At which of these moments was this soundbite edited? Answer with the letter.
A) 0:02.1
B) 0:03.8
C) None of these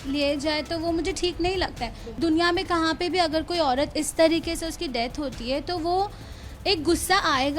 A